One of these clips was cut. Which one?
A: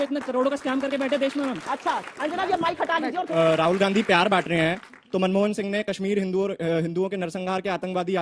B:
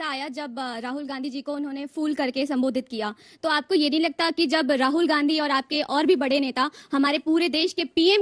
A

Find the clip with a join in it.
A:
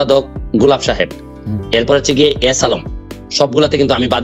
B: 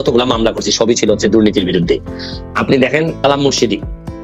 B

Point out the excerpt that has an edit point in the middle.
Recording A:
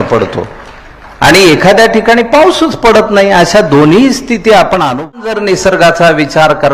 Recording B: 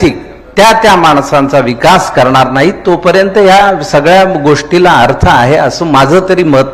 A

